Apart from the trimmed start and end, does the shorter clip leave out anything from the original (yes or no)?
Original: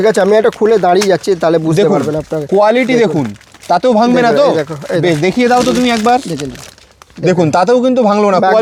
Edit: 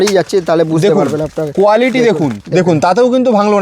yes